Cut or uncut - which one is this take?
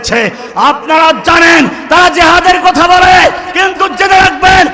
uncut